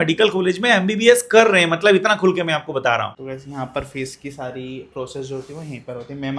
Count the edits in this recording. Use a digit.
1